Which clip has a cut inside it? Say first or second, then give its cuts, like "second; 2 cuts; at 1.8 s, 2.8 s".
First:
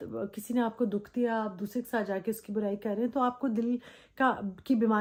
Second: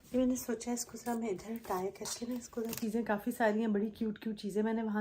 second; 1 cut; at 2.8 s